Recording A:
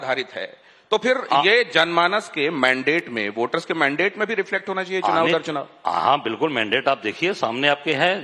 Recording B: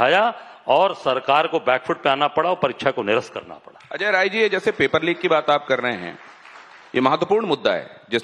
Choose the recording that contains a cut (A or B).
B